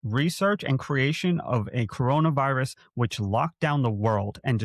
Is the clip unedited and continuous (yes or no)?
yes